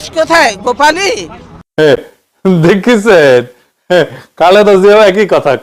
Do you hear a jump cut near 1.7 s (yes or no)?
no